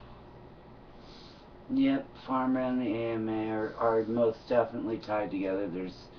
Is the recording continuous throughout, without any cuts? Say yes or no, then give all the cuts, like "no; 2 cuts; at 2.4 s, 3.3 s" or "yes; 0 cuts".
yes; 0 cuts